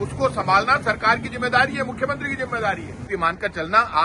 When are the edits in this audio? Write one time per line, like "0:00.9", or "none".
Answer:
0:03.1